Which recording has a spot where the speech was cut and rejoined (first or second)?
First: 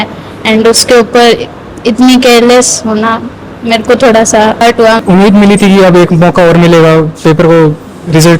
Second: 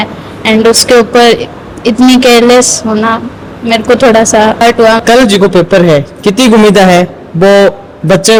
first